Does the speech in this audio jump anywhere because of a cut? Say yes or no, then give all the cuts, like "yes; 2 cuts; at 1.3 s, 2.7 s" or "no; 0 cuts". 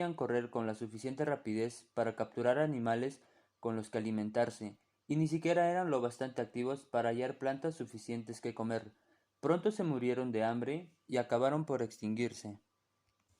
yes; 1 cut; at 8.3 s